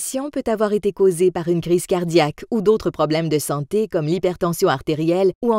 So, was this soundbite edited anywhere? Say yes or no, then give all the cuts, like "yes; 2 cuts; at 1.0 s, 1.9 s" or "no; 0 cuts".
yes; 1 cut; at 1.7 s